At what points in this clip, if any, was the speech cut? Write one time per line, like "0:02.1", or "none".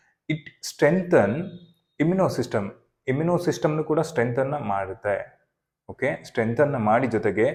none